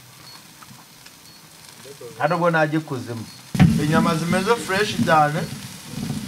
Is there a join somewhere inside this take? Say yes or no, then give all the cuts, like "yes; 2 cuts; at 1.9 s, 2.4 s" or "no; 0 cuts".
yes; 1 cut; at 3.5 s